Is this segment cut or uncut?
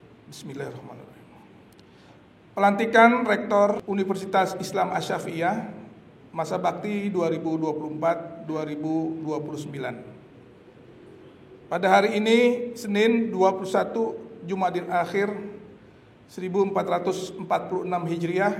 cut